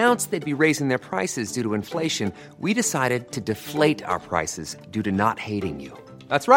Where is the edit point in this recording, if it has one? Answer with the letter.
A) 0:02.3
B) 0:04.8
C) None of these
C